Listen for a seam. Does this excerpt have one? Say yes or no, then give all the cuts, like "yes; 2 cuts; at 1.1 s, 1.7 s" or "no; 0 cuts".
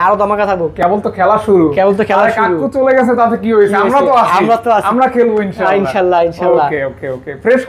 no; 0 cuts